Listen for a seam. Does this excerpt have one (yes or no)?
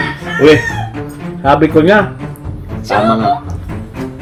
no